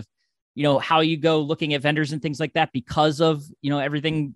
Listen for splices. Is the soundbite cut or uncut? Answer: uncut